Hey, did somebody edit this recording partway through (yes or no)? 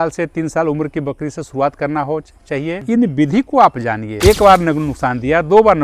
yes